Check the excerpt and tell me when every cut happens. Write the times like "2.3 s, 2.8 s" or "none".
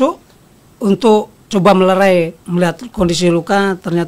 2.4 s